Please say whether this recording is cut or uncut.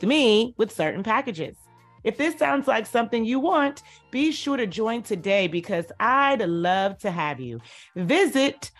uncut